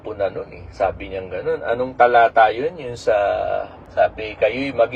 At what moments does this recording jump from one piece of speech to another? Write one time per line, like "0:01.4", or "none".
0:03.8